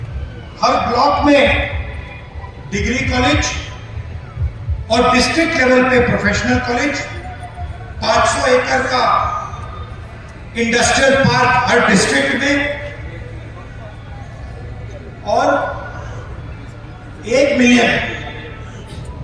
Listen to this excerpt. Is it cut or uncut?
uncut